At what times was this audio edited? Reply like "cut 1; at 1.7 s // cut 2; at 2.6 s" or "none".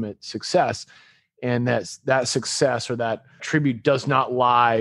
cut 1; at 3.4 s